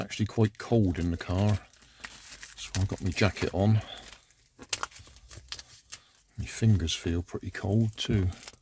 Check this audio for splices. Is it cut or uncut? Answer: uncut